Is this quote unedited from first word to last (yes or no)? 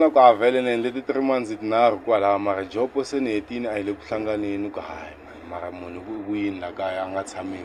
yes